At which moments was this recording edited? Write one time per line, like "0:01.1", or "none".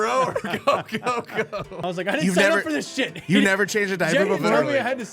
0:01.7